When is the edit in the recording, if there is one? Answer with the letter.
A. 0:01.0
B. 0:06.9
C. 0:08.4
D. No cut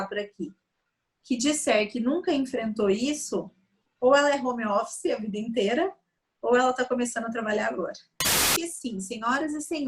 C